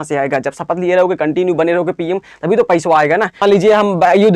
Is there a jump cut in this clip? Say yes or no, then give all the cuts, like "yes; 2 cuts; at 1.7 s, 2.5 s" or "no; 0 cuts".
yes; 1 cut; at 3.4 s